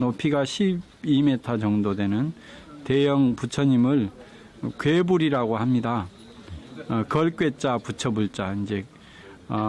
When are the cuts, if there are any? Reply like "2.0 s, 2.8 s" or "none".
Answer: 5.4 s